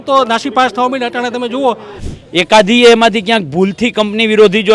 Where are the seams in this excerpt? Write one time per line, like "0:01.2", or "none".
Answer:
0:01.9